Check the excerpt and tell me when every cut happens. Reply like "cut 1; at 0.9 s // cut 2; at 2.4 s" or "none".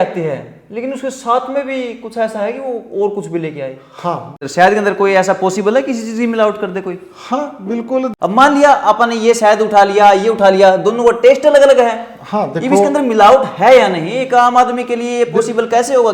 cut 1; at 4.4 s // cut 2; at 8.1 s